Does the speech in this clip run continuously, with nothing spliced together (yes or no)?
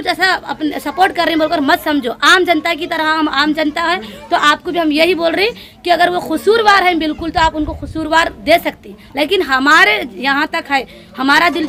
yes